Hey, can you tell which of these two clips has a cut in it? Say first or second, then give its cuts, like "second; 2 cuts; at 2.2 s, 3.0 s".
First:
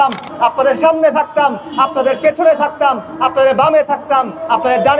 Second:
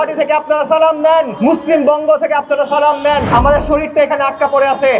second; 2 cuts; at 1.3 s, 3.3 s